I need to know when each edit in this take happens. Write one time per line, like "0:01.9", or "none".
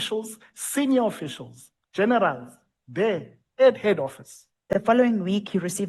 0:04.7